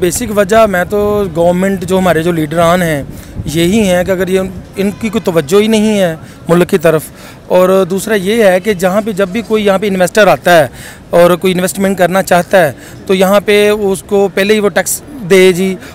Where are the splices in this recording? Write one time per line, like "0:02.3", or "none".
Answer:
none